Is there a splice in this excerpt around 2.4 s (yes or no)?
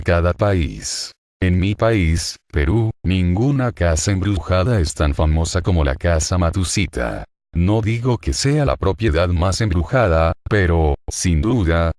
no